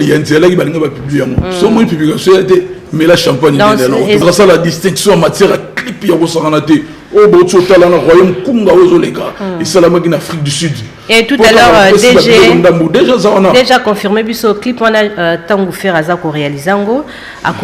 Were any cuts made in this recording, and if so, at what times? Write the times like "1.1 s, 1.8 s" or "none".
4.2 s